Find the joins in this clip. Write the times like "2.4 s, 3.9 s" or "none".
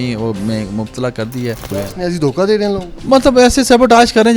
1.7 s